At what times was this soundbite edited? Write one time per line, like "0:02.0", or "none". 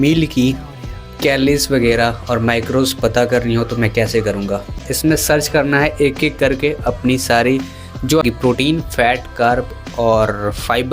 0:04.9
0:08.2